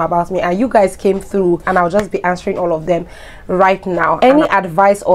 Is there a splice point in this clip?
yes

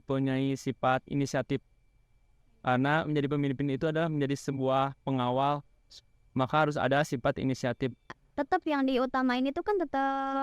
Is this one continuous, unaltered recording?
no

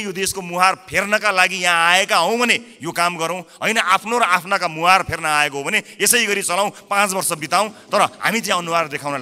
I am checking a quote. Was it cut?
no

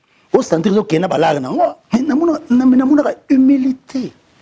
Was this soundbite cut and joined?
yes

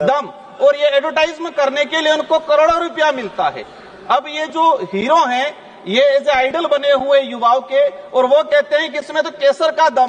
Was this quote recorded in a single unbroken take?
yes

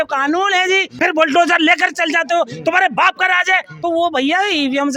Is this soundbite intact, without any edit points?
no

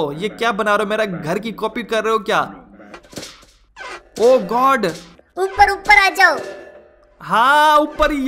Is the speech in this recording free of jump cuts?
no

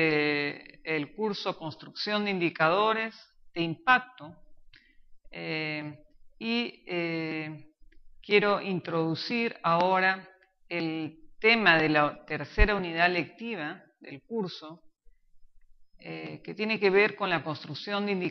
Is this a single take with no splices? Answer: yes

